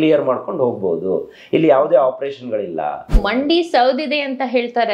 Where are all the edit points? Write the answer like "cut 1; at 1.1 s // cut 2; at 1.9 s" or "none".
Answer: cut 1; at 3.2 s